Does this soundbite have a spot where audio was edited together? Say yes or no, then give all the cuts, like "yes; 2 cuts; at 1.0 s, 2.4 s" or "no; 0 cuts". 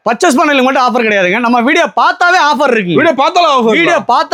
no; 0 cuts